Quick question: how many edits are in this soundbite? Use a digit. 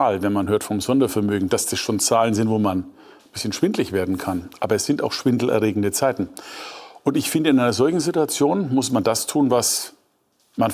0